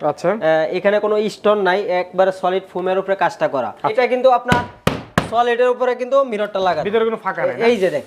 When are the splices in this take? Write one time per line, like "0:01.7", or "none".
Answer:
0:03.9